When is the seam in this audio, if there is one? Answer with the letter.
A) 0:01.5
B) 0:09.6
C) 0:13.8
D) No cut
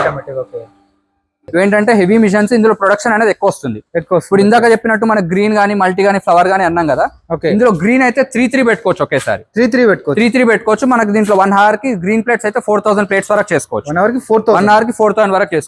A